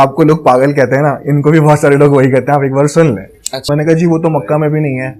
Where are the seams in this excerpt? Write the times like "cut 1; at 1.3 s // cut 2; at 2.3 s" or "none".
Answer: cut 1; at 3.6 s